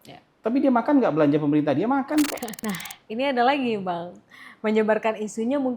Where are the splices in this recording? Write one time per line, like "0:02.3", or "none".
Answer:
0:02.5